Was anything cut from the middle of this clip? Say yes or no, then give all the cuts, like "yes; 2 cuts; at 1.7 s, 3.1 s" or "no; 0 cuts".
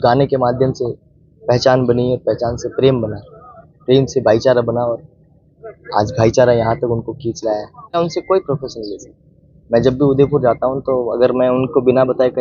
yes; 1 cut; at 8.0 s